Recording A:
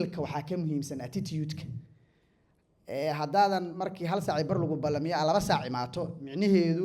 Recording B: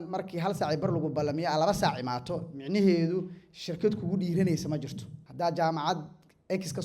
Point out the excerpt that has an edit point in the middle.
B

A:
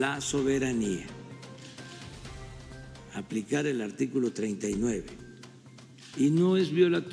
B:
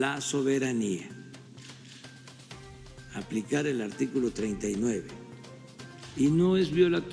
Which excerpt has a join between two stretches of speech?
A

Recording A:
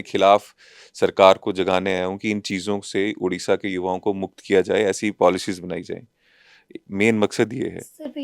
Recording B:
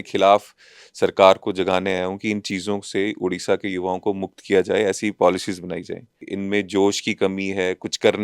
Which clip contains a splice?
B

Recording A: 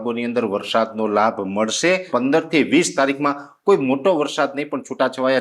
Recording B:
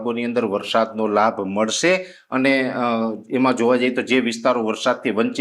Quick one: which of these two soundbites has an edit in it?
A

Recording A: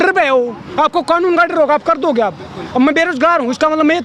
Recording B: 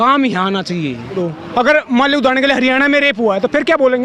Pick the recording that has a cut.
B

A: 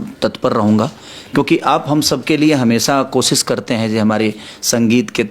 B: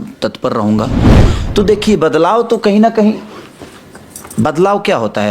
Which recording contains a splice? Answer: B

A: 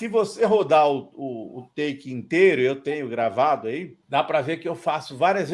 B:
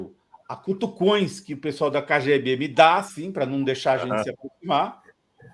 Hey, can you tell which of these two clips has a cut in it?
A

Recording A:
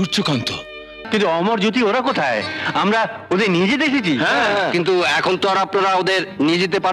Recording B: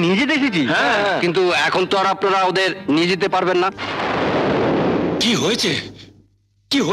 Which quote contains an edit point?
A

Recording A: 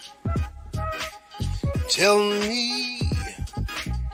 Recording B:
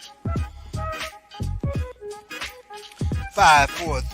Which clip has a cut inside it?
B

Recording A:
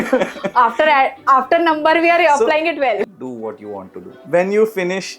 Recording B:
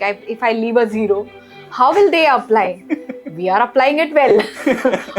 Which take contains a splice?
A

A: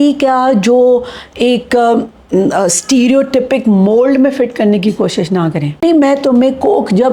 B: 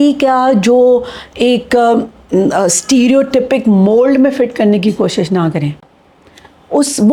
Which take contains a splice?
A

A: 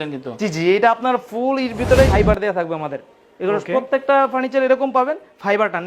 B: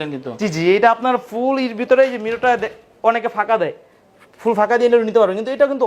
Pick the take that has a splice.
A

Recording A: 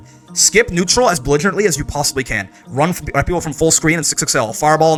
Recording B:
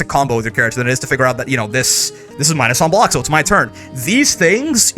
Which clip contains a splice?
B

